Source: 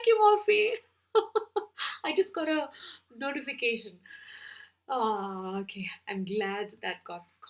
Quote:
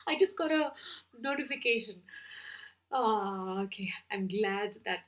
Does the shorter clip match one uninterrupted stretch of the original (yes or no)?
yes